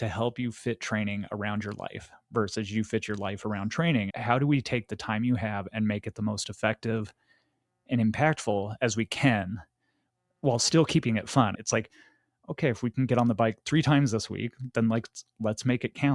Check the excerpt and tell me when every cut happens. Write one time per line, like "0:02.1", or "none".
0:04.1
0:11.6